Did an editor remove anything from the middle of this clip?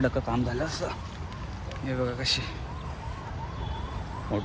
no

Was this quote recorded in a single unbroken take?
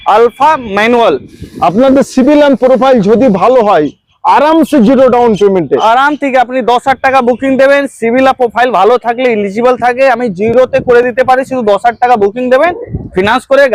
yes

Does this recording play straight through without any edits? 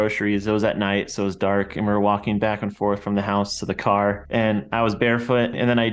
yes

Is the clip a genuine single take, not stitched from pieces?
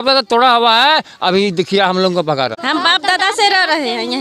no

